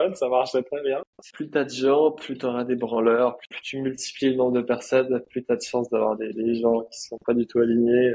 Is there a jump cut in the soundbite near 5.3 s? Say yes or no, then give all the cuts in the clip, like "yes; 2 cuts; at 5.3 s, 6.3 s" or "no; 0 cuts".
no; 2 cuts; at 1.2 s, 3.5 s